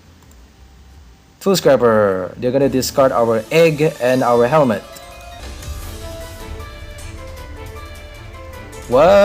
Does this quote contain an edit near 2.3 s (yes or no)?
no